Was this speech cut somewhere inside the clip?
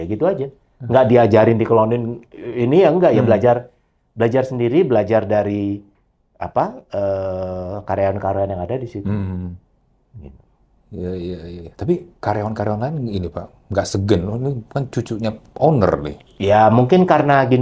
no; 0 cuts

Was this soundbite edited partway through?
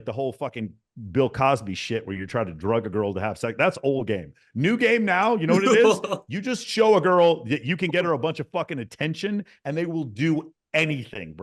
no; 0 cuts

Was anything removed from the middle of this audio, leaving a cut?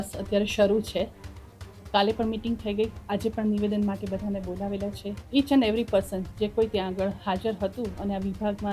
yes; 1 cut; at 5.2 s

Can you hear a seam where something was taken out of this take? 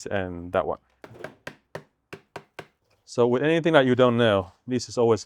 yes; 1 cut; at 2.7 s

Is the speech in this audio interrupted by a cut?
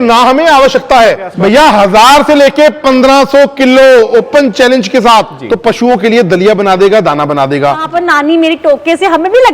yes; 3 cuts; at 1.3 s, 5.4 s, 7.9 s

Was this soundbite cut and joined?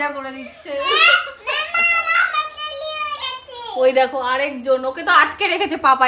no; 0 cuts

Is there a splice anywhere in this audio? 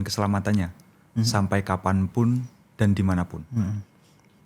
no; 0 cuts

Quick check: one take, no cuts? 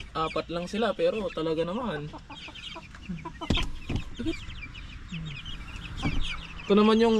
yes; 0 cuts

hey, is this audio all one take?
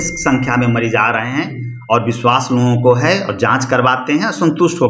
yes; 0 cuts

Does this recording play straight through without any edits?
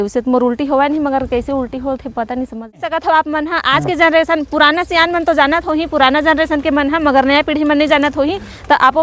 no; 1 cut; at 2.8 s

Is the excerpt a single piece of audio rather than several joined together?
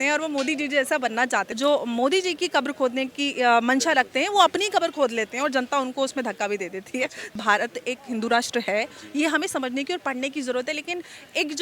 no; 2 cuts; at 1.5 s, 7.4 s

